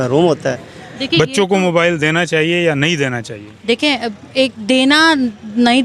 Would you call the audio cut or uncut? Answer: cut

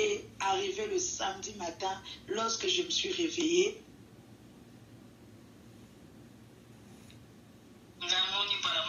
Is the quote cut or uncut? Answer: uncut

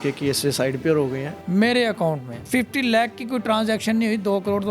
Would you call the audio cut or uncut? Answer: cut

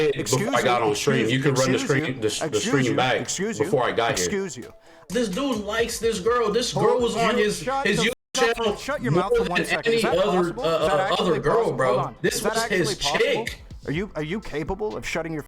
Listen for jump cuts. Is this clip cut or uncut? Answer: cut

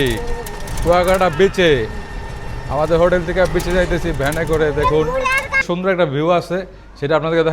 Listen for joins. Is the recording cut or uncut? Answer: cut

